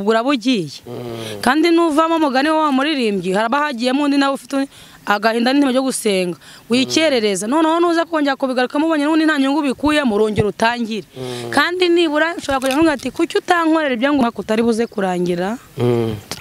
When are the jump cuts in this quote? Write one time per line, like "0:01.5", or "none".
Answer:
0:14.2

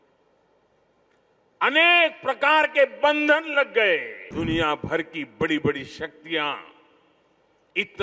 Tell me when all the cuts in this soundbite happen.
0:04.2

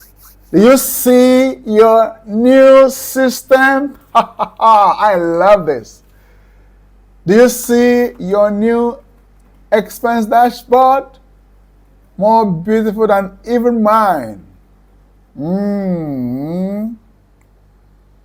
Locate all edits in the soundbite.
none

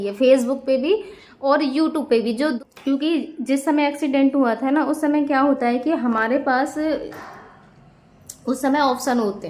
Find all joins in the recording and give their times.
0:02.6

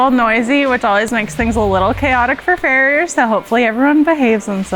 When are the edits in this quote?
none

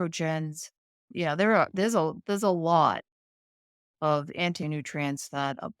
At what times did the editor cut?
0:01.0

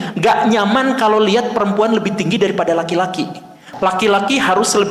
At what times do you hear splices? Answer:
0:03.6

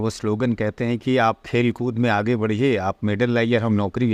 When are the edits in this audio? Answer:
none

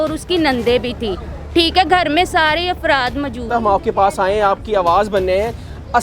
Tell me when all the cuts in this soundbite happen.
0:03.4

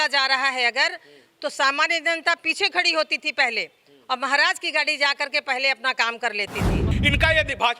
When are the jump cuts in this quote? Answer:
0:06.9

